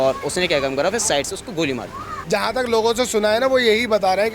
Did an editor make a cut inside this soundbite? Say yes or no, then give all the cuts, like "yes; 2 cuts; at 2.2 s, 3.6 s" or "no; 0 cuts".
yes; 1 cut; at 2.1 s